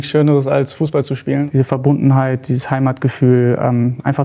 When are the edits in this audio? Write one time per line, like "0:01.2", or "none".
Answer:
0:01.5